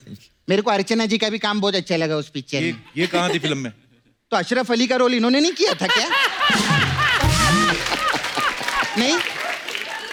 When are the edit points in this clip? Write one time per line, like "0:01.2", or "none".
none

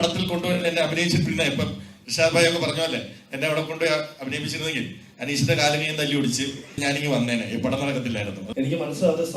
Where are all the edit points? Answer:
0:08.4

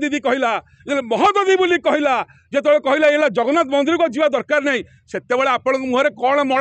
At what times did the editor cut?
none

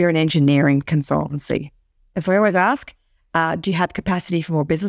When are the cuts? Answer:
0:02.1

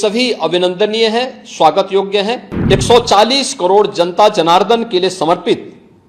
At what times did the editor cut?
0:02.5

